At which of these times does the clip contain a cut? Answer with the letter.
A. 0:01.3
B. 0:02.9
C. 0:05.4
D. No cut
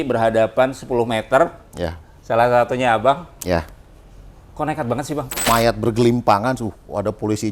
C